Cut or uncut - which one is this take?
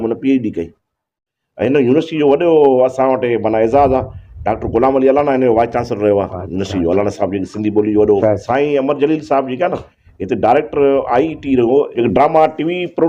cut